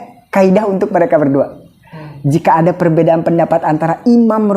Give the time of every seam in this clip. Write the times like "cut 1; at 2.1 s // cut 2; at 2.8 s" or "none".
none